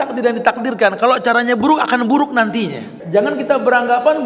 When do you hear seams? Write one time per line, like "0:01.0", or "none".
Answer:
0:02.9